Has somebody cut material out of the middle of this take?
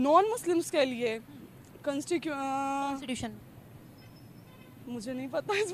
no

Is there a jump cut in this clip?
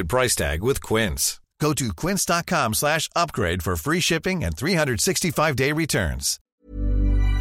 yes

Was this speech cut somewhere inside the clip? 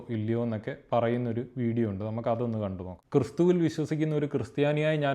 yes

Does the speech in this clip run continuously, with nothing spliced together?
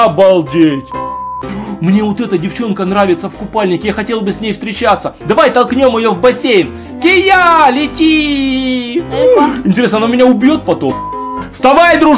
no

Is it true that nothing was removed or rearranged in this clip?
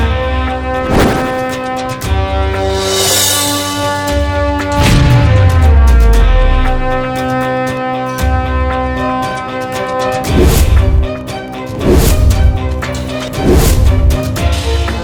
yes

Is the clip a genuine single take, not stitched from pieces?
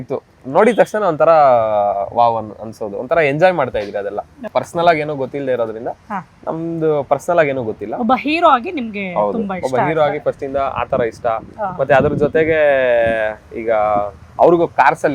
no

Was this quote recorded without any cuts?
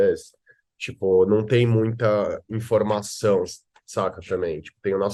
yes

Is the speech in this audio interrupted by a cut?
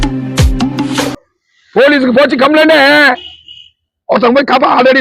yes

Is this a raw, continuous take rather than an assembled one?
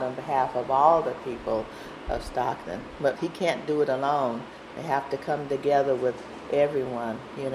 no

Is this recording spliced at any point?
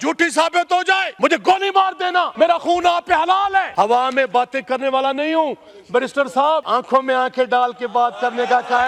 yes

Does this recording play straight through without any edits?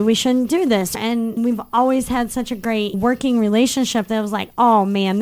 no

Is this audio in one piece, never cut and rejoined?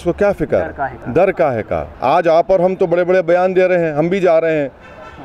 no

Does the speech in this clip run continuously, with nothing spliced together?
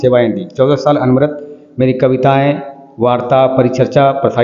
yes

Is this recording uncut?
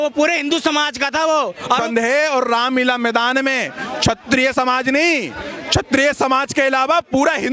no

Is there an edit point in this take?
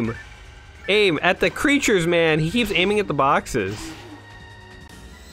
no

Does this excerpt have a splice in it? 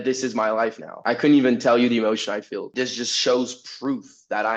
yes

